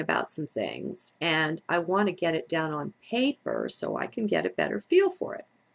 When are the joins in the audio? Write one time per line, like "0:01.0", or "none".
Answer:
0:02.4

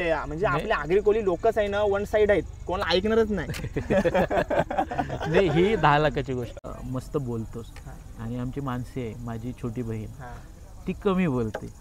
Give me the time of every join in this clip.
0:06.7

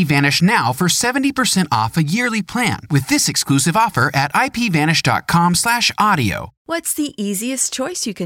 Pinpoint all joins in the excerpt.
0:06.5

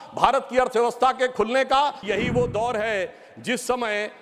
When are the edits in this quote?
0:02.0

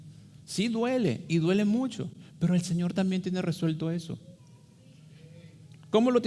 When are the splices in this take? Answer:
none

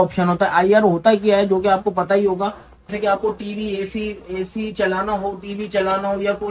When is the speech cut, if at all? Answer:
0:02.9

